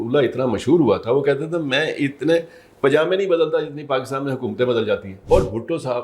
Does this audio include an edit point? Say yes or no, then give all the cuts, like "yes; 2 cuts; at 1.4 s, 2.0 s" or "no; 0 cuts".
yes; 1 cut; at 5.1 s